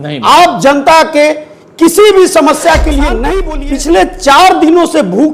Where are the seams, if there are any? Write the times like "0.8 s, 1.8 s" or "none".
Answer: 3.4 s